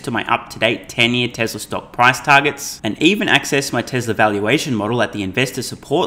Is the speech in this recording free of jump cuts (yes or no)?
yes